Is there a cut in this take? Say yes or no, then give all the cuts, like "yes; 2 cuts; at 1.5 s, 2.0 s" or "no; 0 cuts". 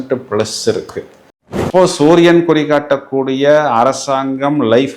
yes; 1 cut; at 1.6 s